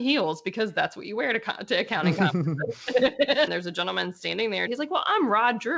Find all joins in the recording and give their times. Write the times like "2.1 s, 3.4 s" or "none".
3.5 s, 4.7 s